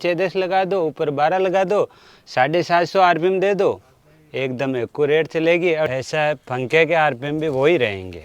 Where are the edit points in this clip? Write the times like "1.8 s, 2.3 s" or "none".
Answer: 5.9 s